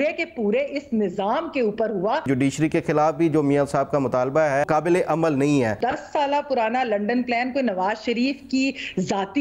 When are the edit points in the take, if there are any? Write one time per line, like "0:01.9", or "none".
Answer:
0:02.3
0:04.6
0:05.8